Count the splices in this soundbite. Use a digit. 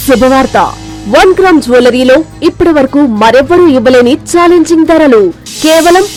0